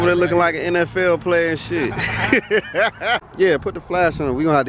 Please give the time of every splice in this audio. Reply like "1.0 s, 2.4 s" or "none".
3.2 s